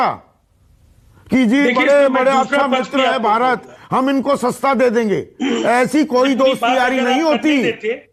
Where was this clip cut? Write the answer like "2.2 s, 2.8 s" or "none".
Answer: none

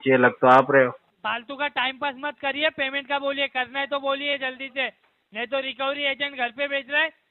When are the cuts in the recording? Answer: 1.1 s

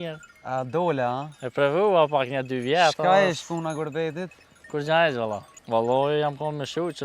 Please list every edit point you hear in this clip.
5.5 s

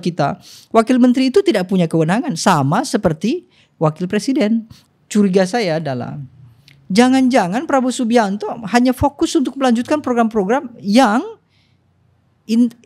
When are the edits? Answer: 4.8 s

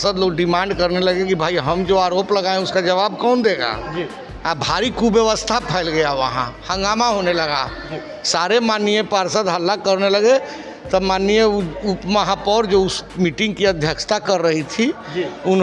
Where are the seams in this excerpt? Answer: none

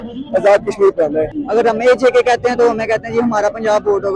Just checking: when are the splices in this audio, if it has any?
1.3 s

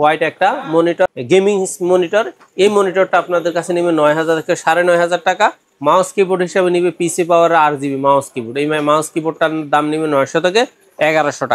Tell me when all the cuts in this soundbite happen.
none

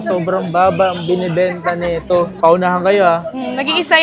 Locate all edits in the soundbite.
none

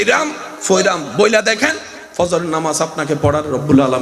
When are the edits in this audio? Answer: none

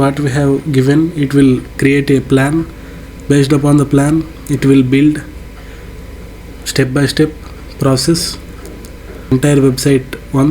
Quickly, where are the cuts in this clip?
9.3 s

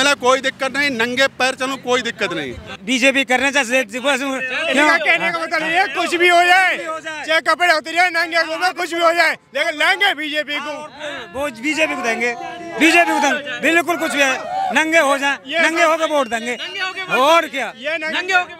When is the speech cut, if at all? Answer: 2.7 s

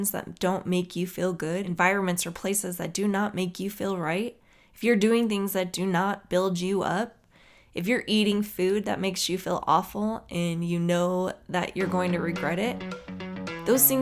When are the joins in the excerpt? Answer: 1.7 s

